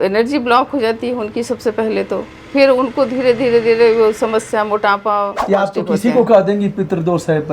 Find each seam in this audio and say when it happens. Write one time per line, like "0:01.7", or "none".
0:05.4

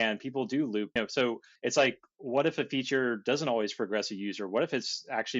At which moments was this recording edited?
0:01.2
0:02.1

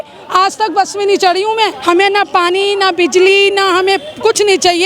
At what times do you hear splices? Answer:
0:01.8

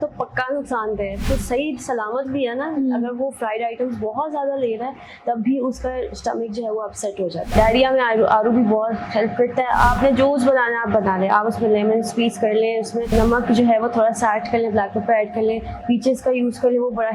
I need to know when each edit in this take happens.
0:01.2
0:07.4
0:13.1

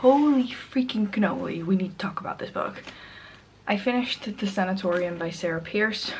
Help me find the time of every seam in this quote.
none

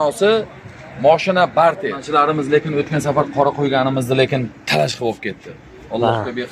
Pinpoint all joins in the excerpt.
0:02.0

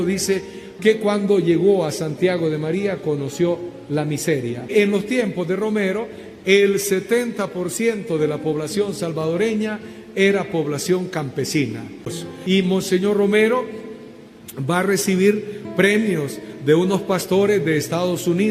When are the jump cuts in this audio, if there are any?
0:04.7
0:12.2

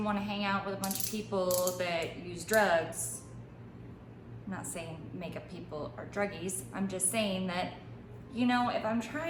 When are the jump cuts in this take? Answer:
none

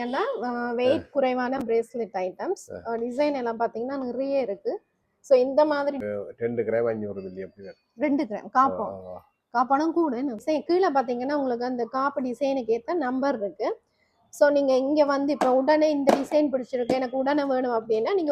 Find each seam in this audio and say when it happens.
0:06.0
0:10.4

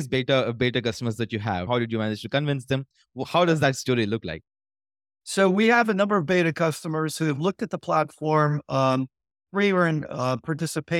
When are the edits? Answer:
0:01.7

